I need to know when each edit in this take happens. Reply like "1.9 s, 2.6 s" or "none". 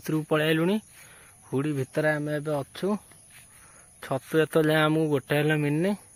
none